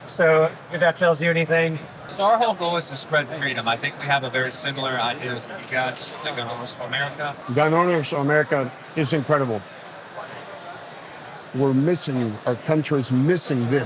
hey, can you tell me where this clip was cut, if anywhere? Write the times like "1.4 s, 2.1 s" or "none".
2.1 s, 7.4 s